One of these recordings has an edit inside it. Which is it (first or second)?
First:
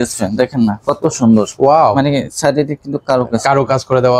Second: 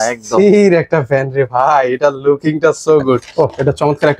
second